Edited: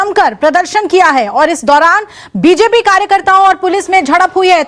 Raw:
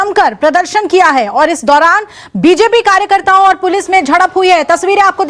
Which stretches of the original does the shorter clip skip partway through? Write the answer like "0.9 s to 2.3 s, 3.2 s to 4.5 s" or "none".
none